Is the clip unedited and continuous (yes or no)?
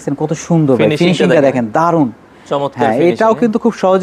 yes